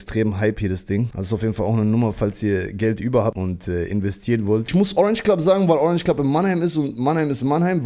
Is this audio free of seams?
no; 3 cuts; at 1.2 s, 3.4 s, 4.7 s

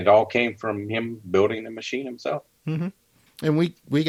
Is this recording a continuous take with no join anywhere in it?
yes; 0 cuts

